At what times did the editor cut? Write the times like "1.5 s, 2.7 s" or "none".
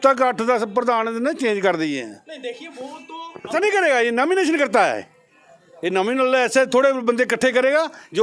3.5 s